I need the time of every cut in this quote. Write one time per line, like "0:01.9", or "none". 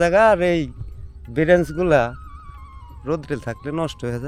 none